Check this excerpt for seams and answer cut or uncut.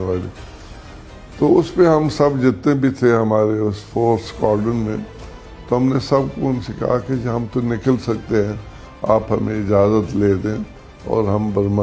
uncut